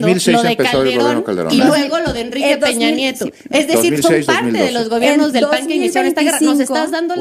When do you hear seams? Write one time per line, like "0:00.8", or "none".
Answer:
none